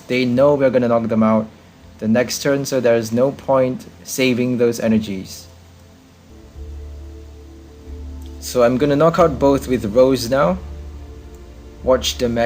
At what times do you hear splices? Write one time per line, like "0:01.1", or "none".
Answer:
0:06.3